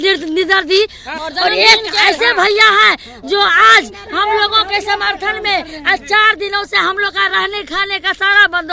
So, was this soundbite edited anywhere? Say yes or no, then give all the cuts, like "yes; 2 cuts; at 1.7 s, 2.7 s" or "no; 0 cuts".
yes; 1 cut; at 1.1 s